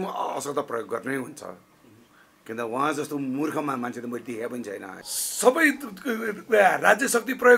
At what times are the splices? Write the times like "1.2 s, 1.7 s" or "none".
4.9 s

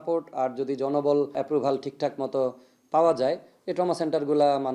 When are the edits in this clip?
1.3 s

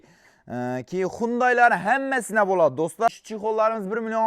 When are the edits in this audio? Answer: 3.1 s

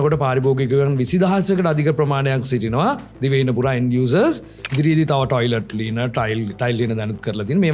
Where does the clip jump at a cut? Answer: 4.7 s

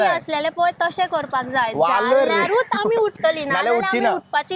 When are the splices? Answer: none

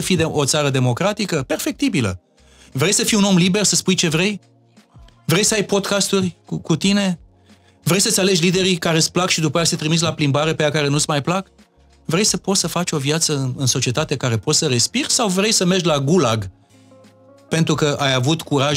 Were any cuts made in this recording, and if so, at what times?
none

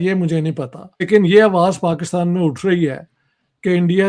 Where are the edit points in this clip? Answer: 1.1 s

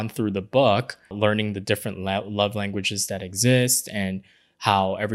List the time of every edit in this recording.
1.1 s

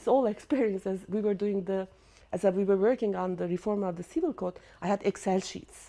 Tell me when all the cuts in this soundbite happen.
none

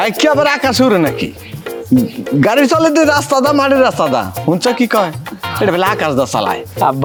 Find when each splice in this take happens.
none

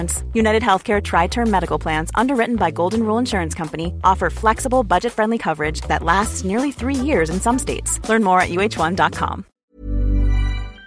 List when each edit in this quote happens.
9.5 s

